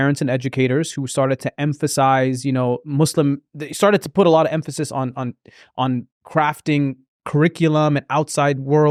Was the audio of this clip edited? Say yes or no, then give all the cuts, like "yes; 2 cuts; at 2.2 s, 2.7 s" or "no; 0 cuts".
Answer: no; 0 cuts